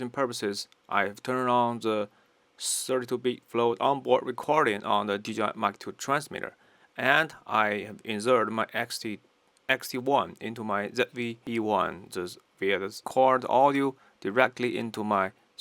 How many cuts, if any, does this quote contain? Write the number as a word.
two